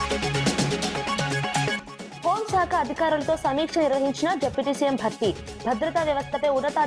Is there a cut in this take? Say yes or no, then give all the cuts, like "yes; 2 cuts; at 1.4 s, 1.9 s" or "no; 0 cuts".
yes; 1 cut; at 1.7 s